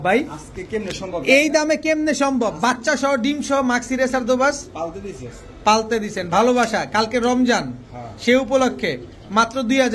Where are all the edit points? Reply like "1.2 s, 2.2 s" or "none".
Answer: none